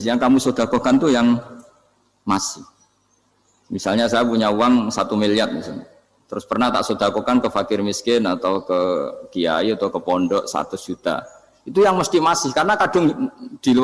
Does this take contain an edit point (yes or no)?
no